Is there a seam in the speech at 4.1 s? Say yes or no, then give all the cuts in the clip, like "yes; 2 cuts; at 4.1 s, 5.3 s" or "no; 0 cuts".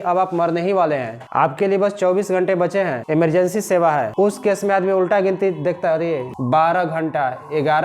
yes; 4 cuts; at 1.2 s, 3.0 s, 4.1 s, 6.3 s